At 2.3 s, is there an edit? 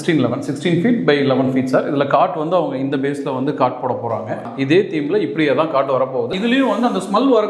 no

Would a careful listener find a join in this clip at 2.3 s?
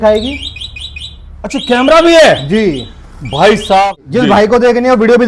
no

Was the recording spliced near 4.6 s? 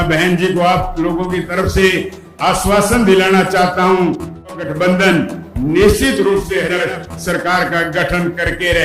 yes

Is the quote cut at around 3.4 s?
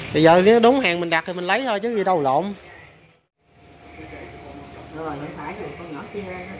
yes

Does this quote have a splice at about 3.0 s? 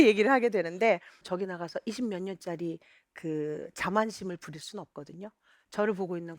no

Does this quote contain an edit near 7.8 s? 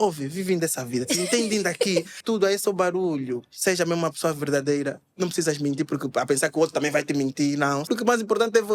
yes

